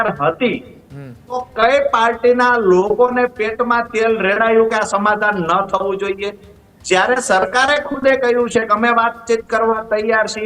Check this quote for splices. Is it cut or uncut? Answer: uncut